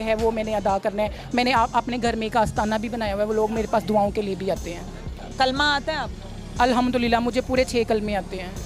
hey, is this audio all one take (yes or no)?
no